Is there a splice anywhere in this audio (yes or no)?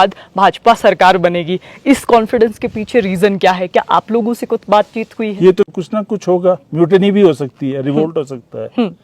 yes